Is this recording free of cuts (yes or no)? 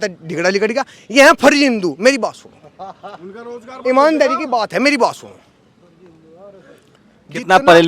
yes